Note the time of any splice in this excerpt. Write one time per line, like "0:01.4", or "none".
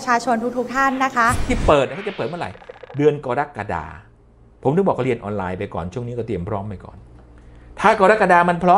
0:01.4